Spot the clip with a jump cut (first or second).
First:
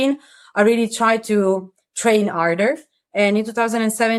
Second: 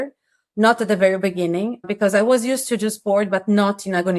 second